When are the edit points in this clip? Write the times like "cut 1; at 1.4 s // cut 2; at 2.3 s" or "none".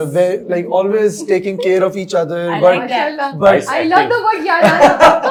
none